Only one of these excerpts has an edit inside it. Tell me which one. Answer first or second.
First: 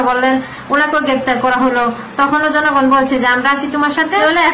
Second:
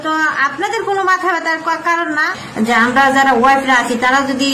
second